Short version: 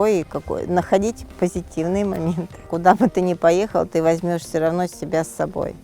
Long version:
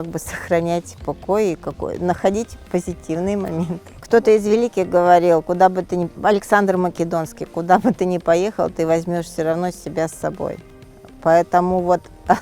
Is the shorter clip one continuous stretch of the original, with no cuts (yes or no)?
no